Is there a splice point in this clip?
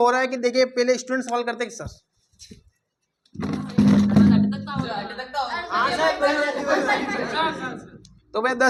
no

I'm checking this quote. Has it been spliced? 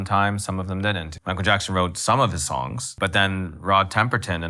yes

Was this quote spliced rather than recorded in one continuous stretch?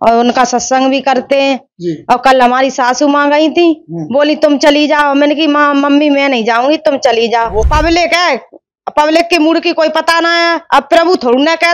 yes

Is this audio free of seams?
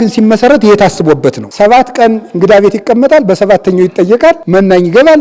no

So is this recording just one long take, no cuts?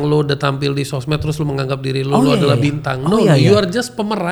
yes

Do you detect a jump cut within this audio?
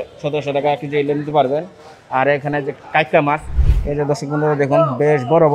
yes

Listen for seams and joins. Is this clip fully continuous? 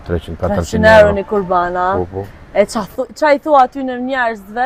yes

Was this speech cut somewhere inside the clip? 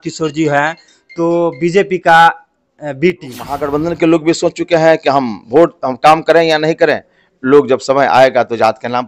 yes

